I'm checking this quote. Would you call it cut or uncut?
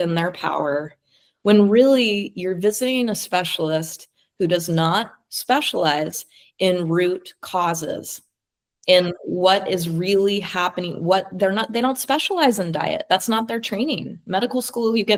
uncut